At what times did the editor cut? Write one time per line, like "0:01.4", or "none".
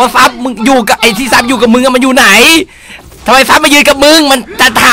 none